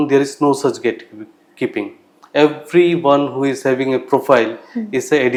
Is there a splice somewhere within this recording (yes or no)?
no